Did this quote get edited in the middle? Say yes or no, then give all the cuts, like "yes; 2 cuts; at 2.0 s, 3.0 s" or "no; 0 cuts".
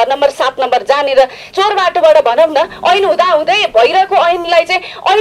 yes; 1 cut; at 1.4 s